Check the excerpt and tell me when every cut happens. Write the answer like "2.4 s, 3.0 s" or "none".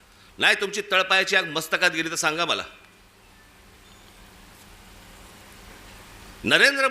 none